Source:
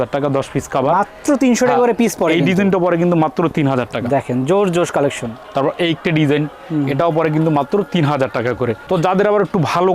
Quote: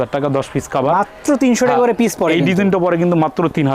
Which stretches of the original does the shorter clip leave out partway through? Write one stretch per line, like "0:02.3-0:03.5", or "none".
none